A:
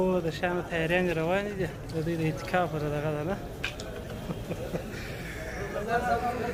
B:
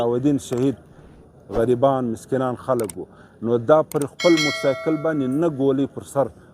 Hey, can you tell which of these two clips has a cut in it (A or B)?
B